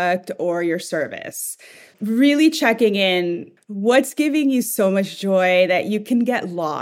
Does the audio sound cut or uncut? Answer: cut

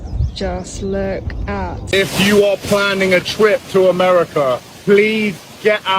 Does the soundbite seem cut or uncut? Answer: cut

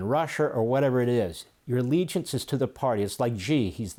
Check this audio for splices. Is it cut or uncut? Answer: uncut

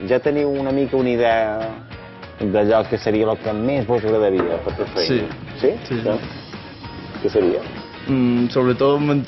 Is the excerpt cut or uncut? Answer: uncut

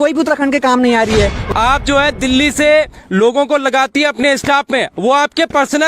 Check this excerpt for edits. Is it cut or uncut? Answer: cut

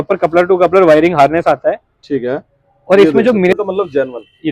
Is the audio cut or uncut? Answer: cut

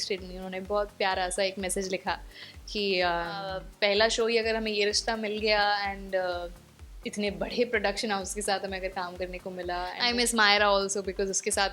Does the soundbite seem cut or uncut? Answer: cut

